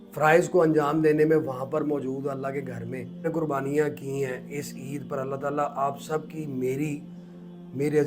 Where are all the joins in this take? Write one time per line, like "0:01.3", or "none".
0:03.2